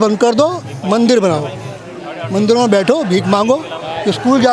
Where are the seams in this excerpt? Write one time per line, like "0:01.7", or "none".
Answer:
none